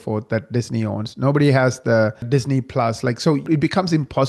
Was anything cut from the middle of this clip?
yes; 2 cuts; at 2.2 s, 3.5 s

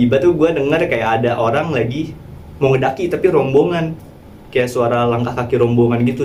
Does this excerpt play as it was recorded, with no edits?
yes; 0 cuts

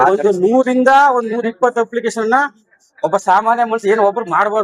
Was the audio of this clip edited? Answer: no; 0 cuts

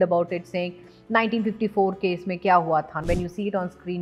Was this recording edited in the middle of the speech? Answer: yes; 1 cut; at 3.0 s

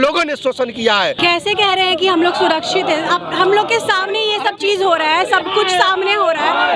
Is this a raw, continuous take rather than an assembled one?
no; 1 cut; at 1.2 s

